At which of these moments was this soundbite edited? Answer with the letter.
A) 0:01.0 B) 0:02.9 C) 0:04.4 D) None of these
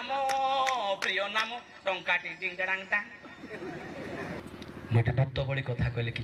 C